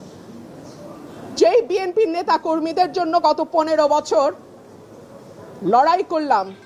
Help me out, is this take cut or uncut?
uncut